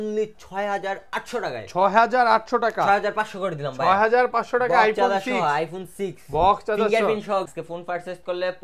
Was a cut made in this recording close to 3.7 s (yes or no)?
no